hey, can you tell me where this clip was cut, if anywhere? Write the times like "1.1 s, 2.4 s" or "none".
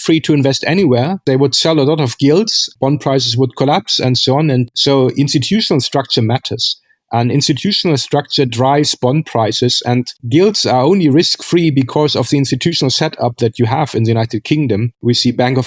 1.2 s, 2.7 s, 4.7 s